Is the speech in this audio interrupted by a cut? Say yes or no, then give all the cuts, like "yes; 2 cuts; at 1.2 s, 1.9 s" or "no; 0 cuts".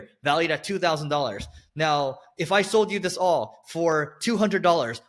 no; 0 cuts